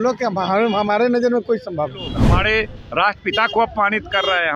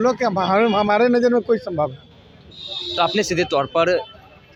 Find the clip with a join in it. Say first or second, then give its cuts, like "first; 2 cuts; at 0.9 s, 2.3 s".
first; 1 cut; at 2.2 s